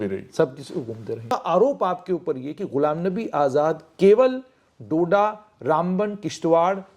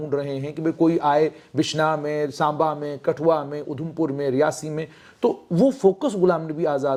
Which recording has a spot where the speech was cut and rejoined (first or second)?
first